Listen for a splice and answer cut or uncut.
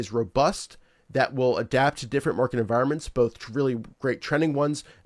uncut